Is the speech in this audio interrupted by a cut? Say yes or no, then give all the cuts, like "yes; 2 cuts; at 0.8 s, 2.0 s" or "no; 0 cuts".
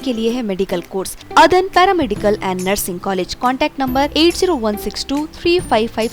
yes; 1 cut; at 1.2 s